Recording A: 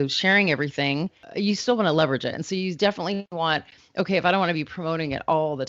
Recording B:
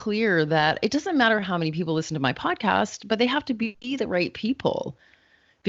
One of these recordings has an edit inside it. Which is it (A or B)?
A